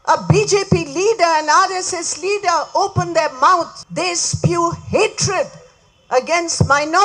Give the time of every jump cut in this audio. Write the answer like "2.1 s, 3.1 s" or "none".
3.8 s